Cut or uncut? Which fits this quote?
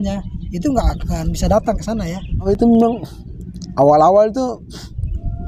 cut